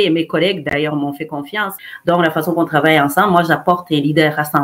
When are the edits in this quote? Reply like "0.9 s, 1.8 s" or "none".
1.7 s